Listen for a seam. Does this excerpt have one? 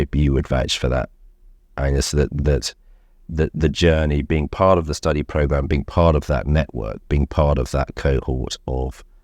no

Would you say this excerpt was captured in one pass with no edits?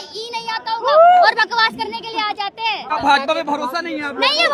no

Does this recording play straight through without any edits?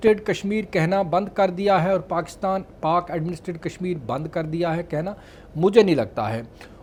yes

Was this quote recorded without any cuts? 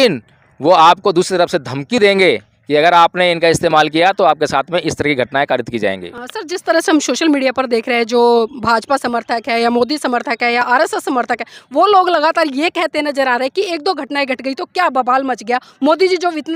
yes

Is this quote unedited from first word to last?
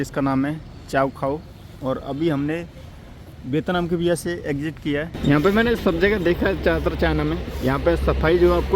no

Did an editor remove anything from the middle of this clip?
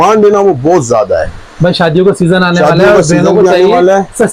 no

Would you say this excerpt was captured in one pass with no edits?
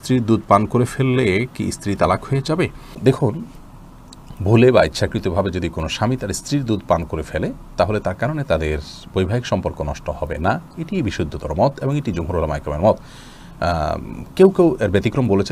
yes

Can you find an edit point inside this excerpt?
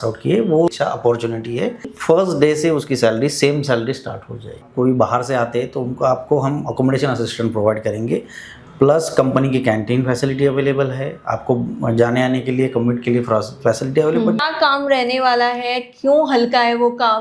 yes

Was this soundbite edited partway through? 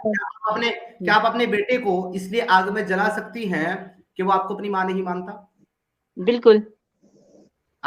no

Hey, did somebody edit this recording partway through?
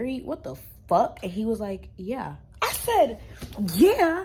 no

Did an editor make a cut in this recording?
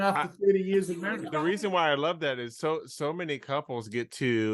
yes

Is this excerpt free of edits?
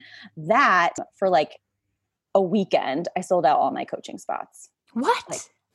no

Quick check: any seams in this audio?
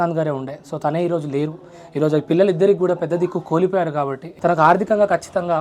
yes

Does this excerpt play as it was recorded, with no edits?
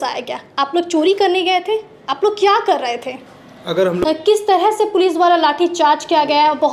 no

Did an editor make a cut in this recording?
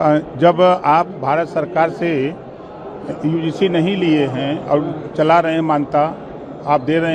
no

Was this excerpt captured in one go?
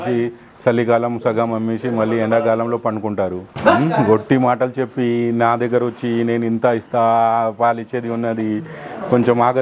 no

